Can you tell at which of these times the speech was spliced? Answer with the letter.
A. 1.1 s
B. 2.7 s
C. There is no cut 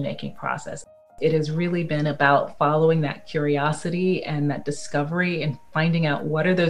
A